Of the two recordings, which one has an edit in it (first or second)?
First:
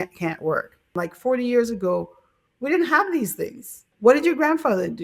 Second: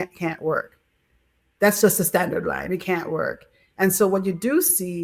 first